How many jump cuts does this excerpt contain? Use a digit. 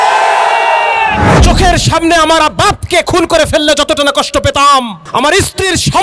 2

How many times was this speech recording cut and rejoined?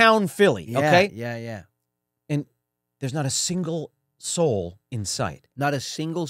0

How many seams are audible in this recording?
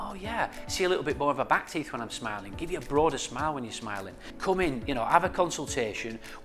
1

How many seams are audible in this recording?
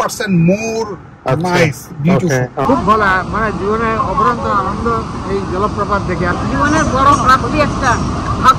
2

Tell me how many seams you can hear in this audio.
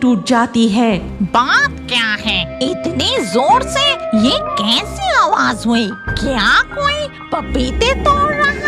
1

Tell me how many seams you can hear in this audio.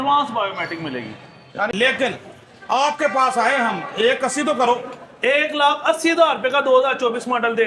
1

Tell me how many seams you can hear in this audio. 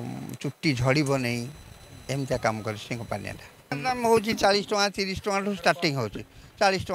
1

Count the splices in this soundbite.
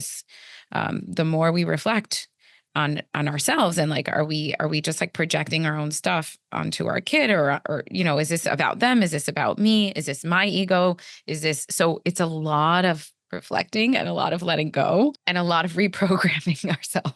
1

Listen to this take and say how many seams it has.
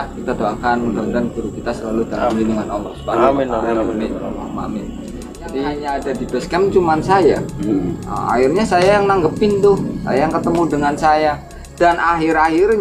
1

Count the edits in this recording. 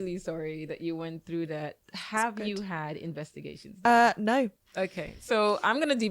1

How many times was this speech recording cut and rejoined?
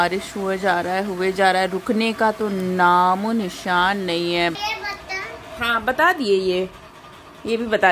1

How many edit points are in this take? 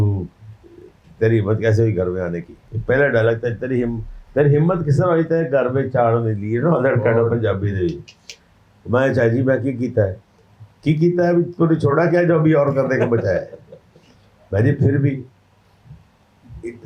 0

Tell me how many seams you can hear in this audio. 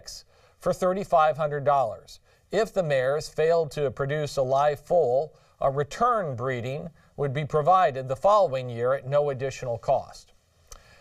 1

